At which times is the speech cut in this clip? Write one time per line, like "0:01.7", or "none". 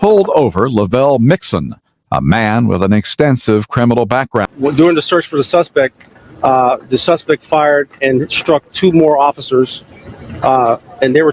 0:04.5

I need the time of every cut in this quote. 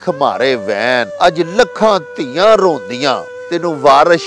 0:01.1
0:03.3

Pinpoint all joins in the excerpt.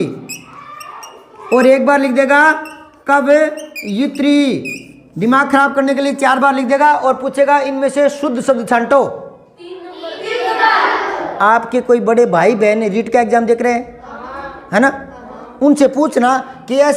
none

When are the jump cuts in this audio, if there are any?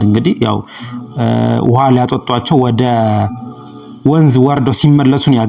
none

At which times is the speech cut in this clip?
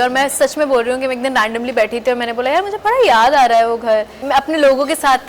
0:04.2

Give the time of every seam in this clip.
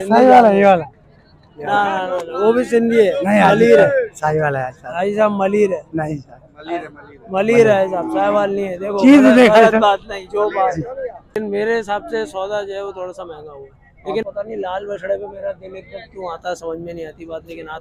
0:11.2
0:14.2

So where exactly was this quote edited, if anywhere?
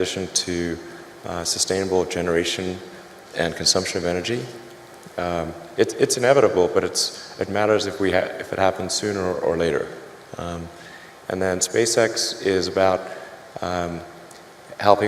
0:05.4

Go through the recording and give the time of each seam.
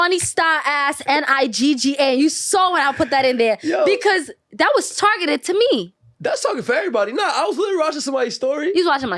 none

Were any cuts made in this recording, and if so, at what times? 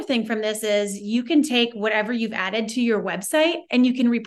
none

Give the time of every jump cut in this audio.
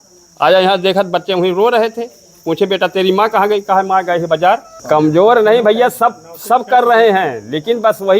0:04.7

